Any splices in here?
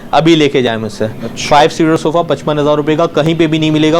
no; 0 cuts

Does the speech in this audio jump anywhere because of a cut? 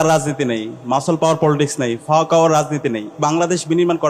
yes; 1 cut; at 3.2 s

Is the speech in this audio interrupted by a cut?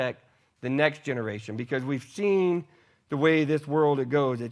no; 0 cuts

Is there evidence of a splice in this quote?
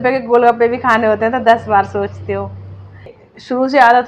yes; 1 cut; at 3.2 s

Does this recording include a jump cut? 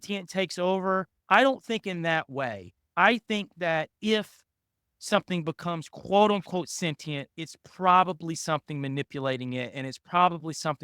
yes; 1 cut; at 1.1 s

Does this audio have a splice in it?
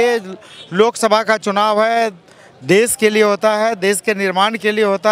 no; 0 cuts

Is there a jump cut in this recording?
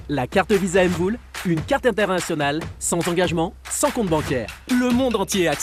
no; 0 cuts

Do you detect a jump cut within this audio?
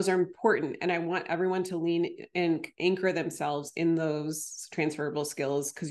no; 0 cuts

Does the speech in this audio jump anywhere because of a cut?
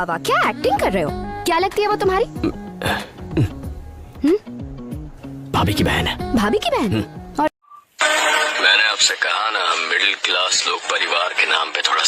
yes; 1 cut; at 7.7 s

